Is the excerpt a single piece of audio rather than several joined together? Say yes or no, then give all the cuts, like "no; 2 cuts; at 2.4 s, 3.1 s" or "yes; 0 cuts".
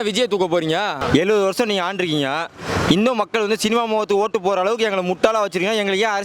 no; 1 cut; at 1.0 s